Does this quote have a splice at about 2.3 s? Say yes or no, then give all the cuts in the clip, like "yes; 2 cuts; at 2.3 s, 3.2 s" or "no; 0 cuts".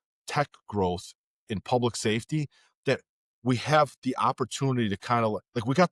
no; 0 cuts